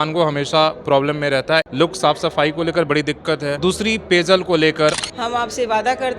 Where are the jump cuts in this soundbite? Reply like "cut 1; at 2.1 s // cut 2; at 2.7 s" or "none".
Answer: cut 1; at 1.7 s // cut 2; at 3.6 s // cut 3; at 5.1 s